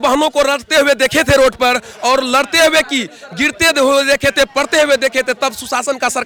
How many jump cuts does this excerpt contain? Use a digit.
0